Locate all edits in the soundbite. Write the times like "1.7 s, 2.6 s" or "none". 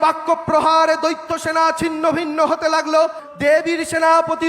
3.2 s

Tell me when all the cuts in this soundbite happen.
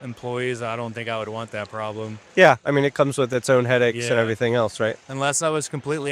none

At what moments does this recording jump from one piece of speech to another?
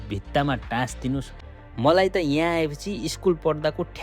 1.4 s

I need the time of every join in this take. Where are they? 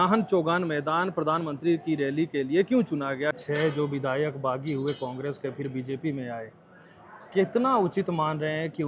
3.4 s

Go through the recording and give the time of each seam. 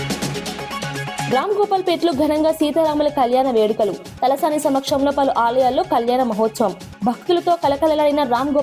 1.3 s

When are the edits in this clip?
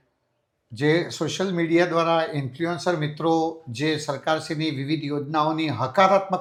none

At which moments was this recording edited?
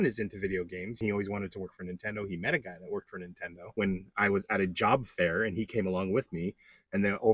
1.0 s, 3.6 s

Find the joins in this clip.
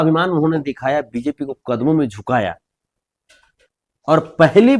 none

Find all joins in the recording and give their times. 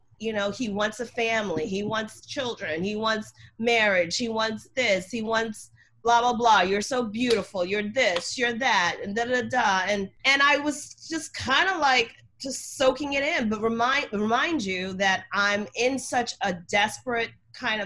none

